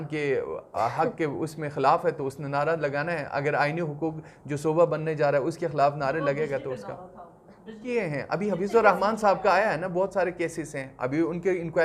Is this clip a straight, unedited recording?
no; 1 cut; at 7.8 s

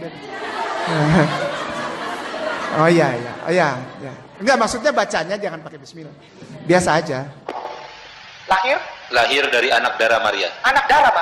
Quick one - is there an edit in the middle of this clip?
yes; 1 cut; at 7.5 s

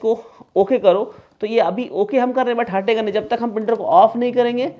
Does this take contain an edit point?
no; 0 cuts

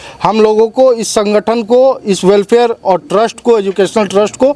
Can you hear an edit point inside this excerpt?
no; 0 cuts

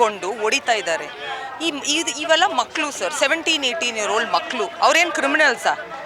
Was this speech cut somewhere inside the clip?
no; 0 cuts

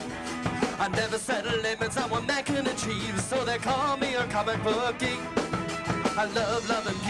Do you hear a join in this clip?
yes; 1 cut; at 6.1 s

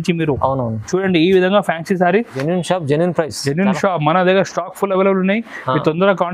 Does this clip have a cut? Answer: yes; 1 cut; at 2.4 s

